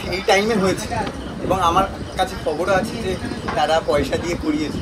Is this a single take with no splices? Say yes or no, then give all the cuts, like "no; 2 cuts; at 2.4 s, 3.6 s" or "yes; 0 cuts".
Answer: yes; 0 cuts